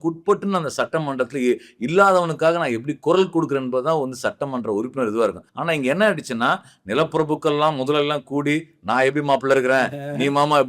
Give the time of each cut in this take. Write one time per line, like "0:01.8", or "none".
0:05.5